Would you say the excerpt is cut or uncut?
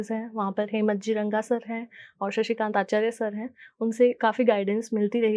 uncut